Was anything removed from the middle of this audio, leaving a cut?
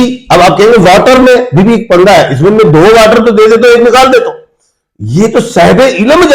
no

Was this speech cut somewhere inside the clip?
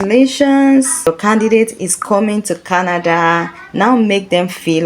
yes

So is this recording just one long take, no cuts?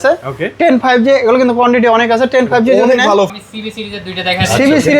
no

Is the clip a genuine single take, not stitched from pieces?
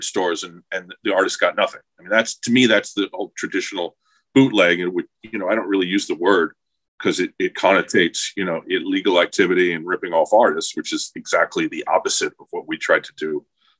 yes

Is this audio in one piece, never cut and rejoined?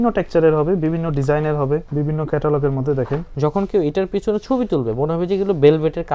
no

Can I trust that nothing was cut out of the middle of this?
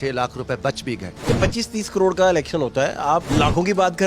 no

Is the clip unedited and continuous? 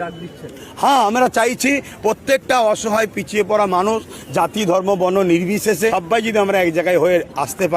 no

